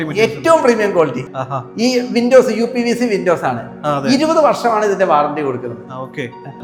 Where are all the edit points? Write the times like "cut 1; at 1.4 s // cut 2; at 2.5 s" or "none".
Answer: none